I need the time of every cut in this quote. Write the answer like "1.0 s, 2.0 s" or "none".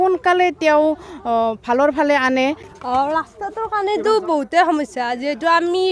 2.7 s